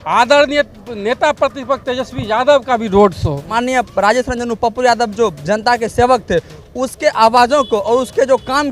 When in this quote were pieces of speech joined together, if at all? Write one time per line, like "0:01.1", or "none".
0:03.4